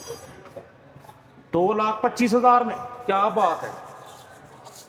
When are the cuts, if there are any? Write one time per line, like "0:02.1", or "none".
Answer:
none